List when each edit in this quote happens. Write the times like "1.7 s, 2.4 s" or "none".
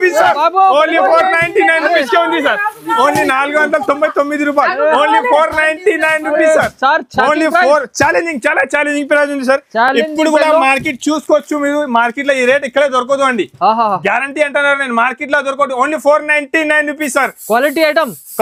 none